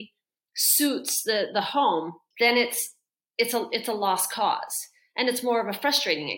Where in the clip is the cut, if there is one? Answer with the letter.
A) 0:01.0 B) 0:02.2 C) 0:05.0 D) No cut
B